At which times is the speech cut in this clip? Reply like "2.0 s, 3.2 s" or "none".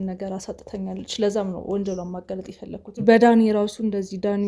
3.0 s